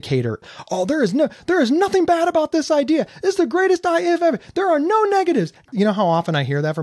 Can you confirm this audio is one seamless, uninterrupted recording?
no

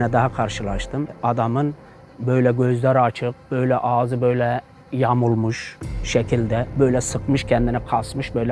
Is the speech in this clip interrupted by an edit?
yes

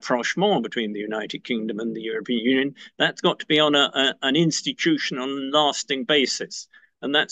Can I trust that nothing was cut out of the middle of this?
yes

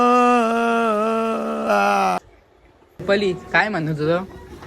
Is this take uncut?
no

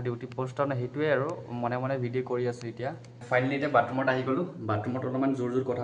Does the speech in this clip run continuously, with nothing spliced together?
no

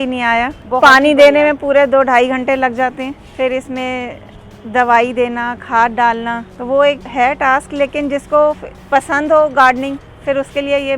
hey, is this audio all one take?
no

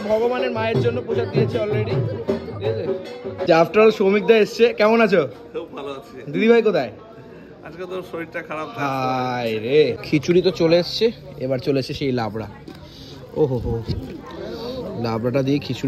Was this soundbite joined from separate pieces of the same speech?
yes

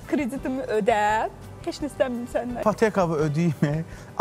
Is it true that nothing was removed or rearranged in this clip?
no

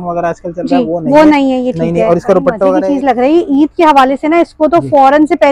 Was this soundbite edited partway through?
yes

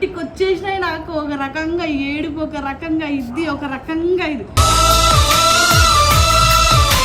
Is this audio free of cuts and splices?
yes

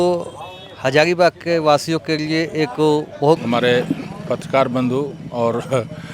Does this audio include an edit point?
yes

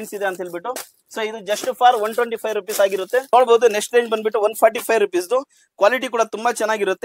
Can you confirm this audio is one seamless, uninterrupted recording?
no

